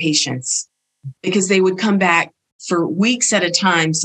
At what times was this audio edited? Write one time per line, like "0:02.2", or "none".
none